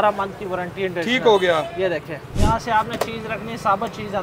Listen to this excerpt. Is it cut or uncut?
cut